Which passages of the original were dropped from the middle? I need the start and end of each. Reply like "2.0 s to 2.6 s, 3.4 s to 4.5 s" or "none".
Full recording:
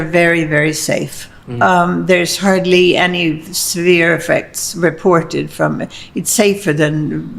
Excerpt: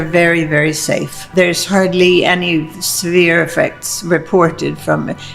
1.3 s to 2.0 s

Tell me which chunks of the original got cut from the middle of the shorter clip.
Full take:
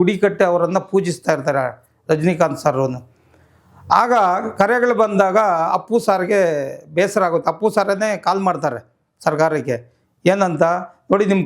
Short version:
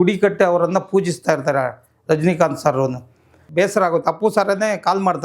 3.4 s to 6.8 s

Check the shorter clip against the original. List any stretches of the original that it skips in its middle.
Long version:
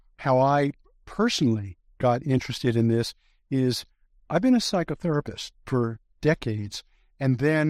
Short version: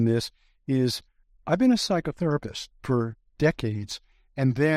none

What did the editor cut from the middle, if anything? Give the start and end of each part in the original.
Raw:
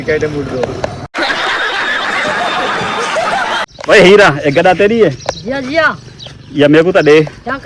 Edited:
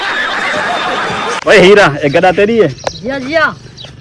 3.1 s to 3.8 s

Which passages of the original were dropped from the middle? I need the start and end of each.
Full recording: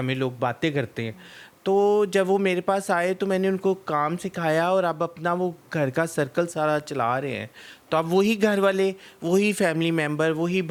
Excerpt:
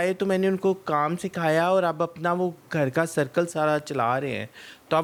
none

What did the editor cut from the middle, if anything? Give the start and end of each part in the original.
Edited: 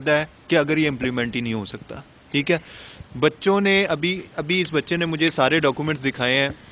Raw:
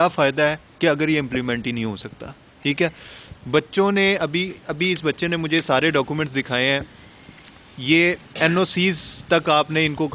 none

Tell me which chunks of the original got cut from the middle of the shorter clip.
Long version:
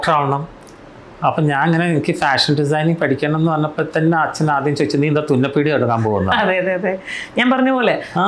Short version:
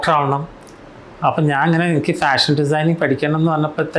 none

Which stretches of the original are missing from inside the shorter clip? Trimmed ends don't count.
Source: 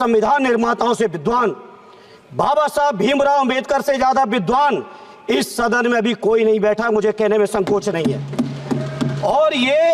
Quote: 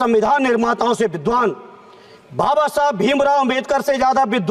none

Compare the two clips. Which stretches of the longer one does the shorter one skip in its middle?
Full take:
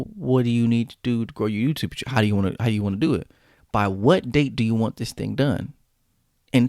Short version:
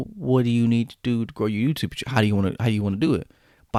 none

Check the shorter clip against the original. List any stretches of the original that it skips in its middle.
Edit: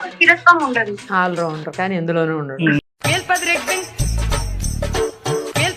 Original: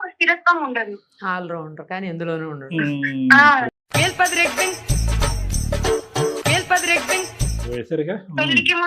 1.0 s to 1.1 s, 2.9 s to 3.7 s

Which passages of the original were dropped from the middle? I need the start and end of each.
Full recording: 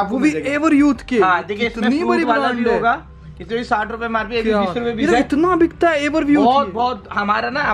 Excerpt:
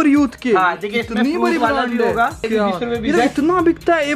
3.1 s to 4.3 s

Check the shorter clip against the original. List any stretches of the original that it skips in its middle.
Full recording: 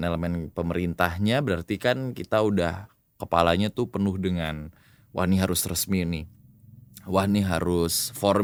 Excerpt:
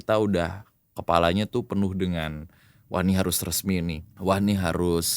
6.3 s to 6.9 s

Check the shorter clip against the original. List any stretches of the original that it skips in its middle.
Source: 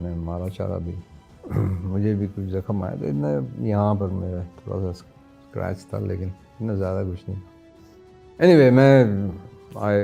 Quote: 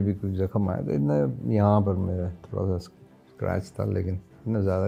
none

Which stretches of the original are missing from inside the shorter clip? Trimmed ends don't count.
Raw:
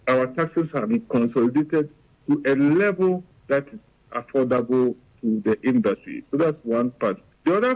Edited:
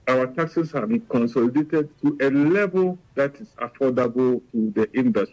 1.9 s to 2.2 s, 3.4 s to 3.7 s, 5.0 s to 5.2 s

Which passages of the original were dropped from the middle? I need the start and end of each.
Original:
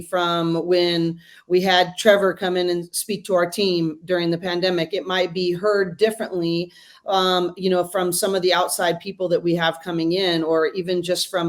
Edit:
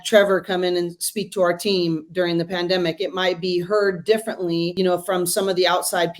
6.6 s to 7.6 s

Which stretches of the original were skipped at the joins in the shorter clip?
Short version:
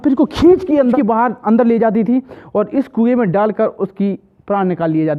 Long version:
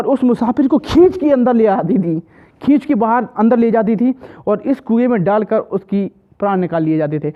1.5 s to 2.9 s

